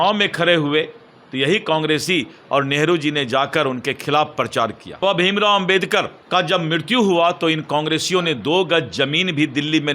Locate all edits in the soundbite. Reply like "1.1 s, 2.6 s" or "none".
5.0 s, 6.2 s